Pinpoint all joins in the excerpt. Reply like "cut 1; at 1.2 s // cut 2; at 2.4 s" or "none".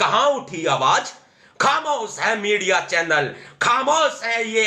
none